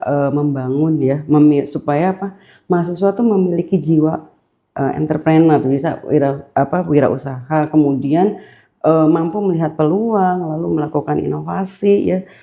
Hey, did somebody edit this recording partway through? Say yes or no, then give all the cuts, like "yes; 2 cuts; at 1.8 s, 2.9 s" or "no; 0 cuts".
no; 0 cuts